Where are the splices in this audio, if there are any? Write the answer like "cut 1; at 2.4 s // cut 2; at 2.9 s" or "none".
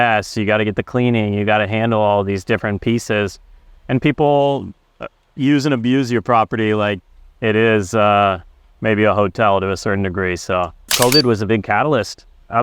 cut 1; at 10.8 s

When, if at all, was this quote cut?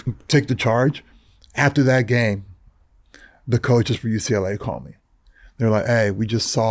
none

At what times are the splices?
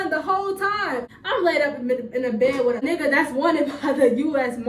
cut 1; at 1.1 s // cut 2; at 2.8 s

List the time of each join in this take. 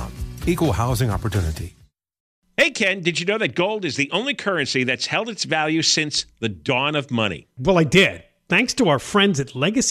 cut 1; at 2.2 s

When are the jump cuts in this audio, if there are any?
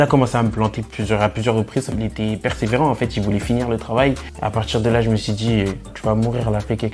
cut 1; at 1.9 s // cut 2; at 4.3 s

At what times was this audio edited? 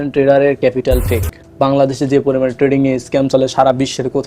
cut 1; at 1.4 s

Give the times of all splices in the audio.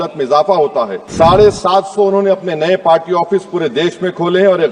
cut 1; at 1.0 s

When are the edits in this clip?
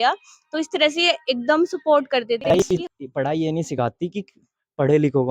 cut 1; at 2.6 s

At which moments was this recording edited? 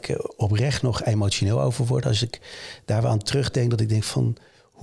none

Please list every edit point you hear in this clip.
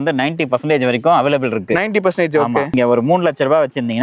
cut 1; at 2.7 s

